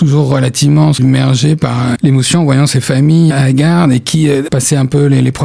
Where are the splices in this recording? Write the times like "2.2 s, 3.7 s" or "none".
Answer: 1.0 s, 2.0 s, 3.3 s, 4.5 s